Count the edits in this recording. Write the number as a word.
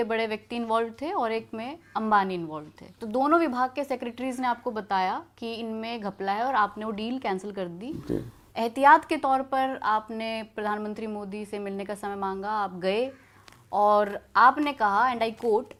zero